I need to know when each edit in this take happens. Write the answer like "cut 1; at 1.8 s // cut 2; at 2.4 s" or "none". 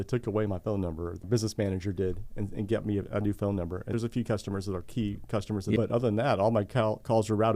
cut 1; at 1.2 s // cut 2; at 3.9 s // cut 3; at 5.8 s